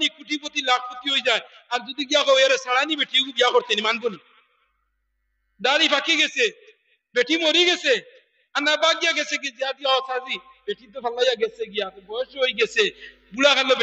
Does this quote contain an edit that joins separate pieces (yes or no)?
no